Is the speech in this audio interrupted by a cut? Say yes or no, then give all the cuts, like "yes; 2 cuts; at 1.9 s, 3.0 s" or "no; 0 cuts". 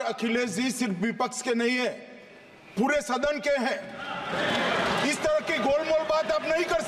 no; 0 cuts